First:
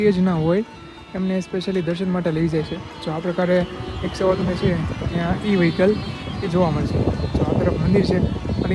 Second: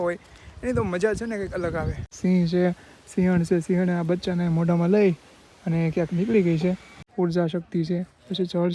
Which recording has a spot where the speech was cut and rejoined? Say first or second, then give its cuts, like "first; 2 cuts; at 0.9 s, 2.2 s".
second; 2 cuts; at 2.0 s, 7.0 s